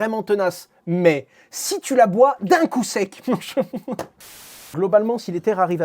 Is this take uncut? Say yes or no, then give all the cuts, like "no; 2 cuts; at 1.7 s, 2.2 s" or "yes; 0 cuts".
no; 1 cut; at 4.6 s